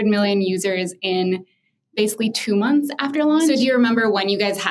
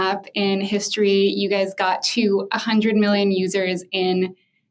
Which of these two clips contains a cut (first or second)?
first